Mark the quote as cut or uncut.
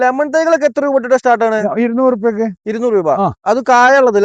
uncut